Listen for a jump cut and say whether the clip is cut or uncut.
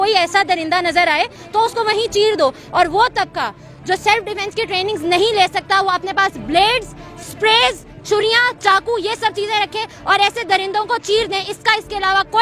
cut